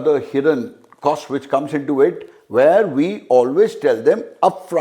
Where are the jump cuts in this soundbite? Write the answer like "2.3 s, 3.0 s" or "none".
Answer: none